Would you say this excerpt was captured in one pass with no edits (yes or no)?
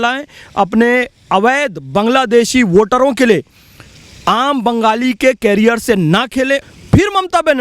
no